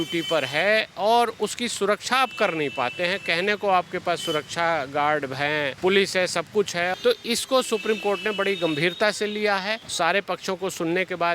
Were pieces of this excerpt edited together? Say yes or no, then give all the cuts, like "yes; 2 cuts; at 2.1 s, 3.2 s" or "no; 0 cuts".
yes; 3 cuts; at 5.7 s, 6.9 s, 9.8 s